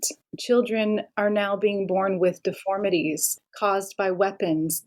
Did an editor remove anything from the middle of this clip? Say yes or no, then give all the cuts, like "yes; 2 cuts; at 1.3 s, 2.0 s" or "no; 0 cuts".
no; 0 cuts